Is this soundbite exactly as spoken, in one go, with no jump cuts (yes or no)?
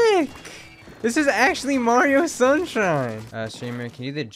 no